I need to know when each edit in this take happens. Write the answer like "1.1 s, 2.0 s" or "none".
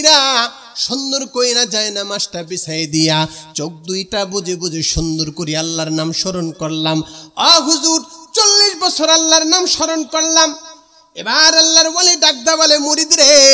none